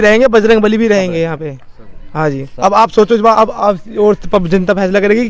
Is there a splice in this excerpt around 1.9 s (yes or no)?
no